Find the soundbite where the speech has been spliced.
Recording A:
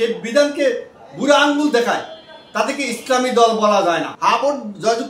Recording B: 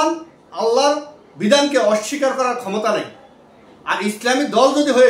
A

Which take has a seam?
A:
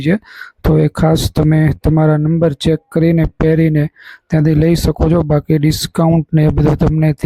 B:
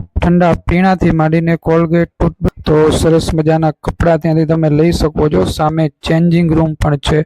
B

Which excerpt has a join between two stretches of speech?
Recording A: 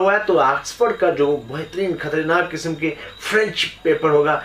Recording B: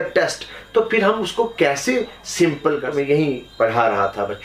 B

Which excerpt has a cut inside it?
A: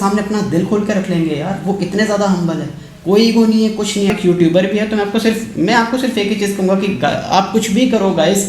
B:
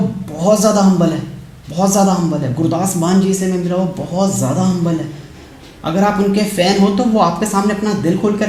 A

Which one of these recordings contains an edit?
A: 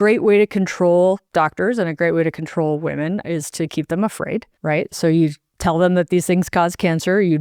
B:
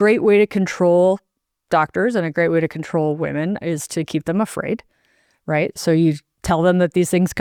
A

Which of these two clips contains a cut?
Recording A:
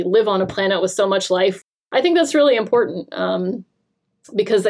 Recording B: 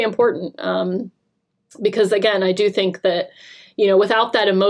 A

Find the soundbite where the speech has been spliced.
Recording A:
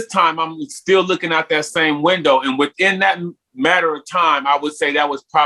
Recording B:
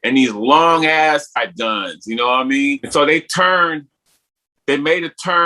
B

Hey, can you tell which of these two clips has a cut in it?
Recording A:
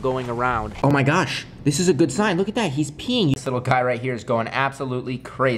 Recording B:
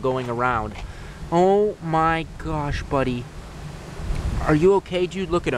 A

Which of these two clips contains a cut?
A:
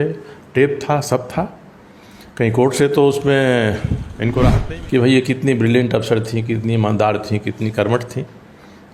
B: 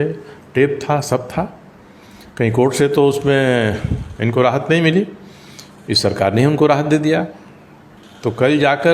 A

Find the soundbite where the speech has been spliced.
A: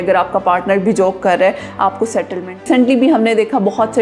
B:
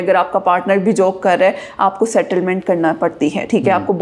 A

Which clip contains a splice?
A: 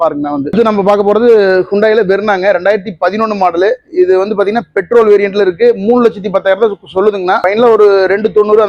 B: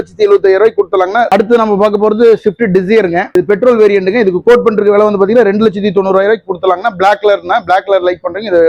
B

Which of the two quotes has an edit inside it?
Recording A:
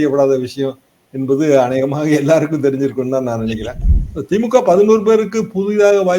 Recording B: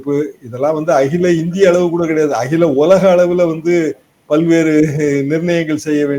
A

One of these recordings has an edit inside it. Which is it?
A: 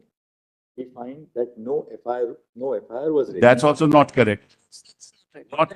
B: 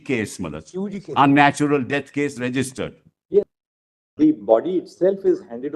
B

